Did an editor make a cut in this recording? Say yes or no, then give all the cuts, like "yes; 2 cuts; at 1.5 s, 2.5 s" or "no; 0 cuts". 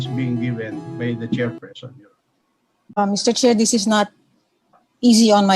yes; 1 cut; at 3.0 s